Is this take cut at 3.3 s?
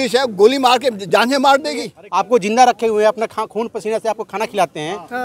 no; 1 cut; at 2.0 s

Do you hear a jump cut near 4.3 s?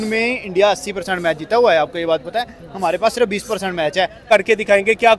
yes; 1 cut; at 4.3 s

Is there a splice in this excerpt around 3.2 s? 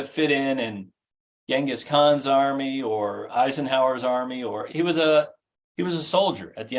yes; 2 cuts; at 3.2 s, 4.7 s

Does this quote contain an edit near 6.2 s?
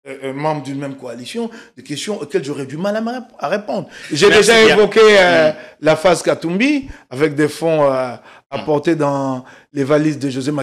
no; 1 cut; at 4.0 s

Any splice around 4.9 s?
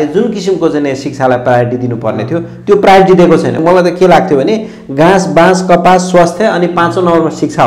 no; 1 cut; at 3.6 s

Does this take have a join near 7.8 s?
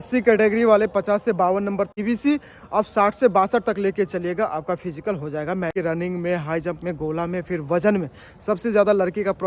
no; 2 cuts; at 1.9 s, 5.7 s

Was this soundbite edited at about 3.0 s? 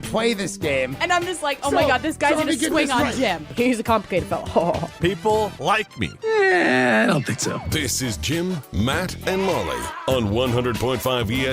no; 2 cuts; at 7.7 s, 9.9 s

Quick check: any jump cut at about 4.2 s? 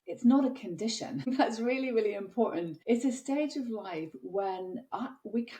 no; 2 cuts; at 1.3 s, 2.7 s

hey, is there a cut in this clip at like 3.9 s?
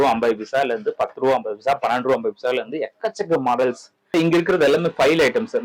yes; 1 cut; at 3.9 s

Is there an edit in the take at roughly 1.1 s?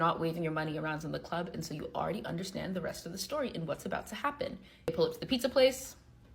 no; 1 cut; at 4.9 s

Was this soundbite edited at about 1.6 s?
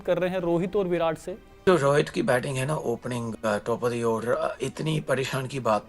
yes; 1 cut; at 1.6 s

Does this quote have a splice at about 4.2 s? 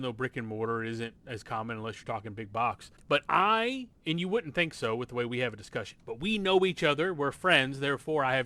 no; 1 cut; at 2.9 s

